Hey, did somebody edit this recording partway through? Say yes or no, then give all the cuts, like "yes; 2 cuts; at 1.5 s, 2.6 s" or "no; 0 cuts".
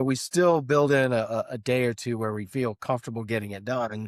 no; 0 cuts